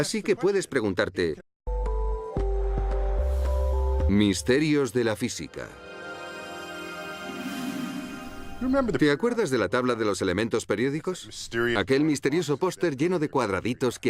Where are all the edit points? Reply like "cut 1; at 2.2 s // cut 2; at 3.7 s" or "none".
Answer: none